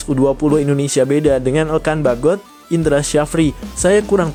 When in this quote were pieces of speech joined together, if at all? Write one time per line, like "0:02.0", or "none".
none